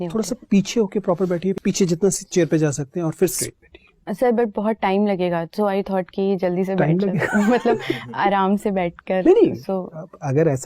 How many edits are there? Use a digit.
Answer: 2